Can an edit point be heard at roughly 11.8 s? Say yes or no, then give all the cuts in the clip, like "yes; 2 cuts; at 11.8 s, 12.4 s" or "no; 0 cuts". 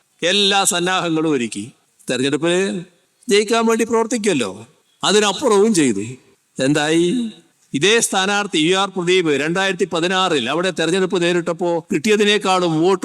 yes; 1 cut; at 11.8 s